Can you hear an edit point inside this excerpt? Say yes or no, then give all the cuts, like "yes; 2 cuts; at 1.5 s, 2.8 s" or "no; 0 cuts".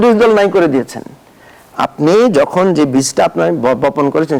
no; 0 cuts